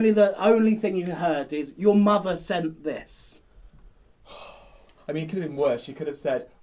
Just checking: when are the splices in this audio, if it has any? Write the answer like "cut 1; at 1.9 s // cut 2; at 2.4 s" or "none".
none